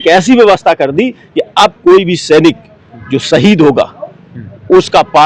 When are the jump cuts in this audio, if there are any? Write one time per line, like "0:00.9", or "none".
none